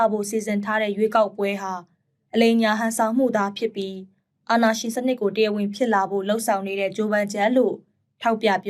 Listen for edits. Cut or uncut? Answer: uncut